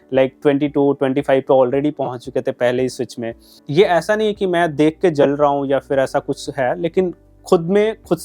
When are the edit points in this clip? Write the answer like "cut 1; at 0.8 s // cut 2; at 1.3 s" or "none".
cut 1; at 3.5 s